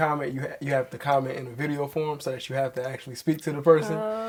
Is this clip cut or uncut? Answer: uncut